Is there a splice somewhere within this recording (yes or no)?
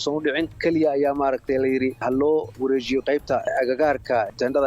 no